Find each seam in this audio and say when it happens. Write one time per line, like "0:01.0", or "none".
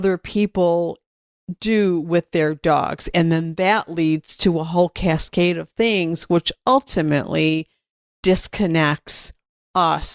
none